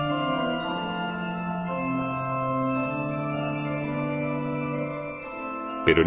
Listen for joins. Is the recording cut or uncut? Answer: cut